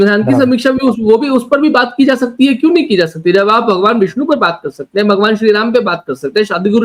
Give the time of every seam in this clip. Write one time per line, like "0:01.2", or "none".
none